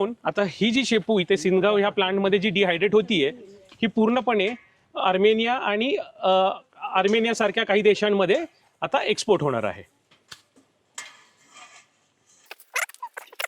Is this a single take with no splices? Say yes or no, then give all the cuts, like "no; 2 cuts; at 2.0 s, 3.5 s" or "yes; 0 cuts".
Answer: yes; 0 cuts